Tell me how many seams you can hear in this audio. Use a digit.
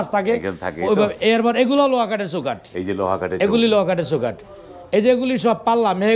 0